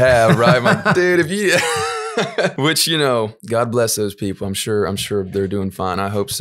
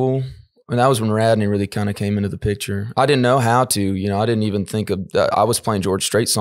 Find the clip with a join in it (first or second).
first